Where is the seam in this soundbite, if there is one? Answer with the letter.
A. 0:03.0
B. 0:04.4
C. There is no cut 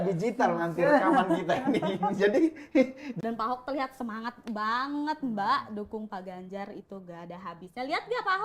A